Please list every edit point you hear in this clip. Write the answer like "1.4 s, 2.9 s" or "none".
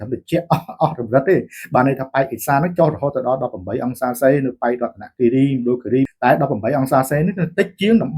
6.1 s